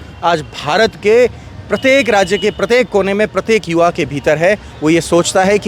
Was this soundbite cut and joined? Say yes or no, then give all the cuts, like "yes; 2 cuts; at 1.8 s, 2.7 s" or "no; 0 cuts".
no; 0 cuts